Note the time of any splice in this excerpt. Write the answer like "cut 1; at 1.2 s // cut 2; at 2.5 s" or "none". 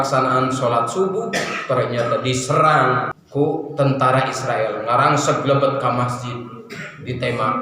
cut 1; at 3.2 s